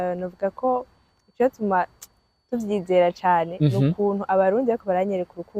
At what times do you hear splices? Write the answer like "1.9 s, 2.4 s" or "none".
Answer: none